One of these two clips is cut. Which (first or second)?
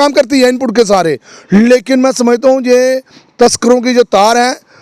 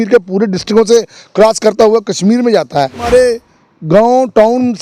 second